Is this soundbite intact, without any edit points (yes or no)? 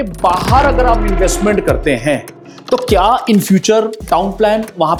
yes